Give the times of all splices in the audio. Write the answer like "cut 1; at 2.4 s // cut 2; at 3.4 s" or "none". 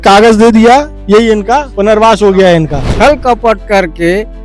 cut 1; at 1.7 s // cut 2; at 2.8 s